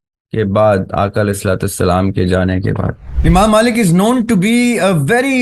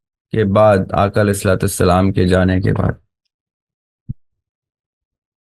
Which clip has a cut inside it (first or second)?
first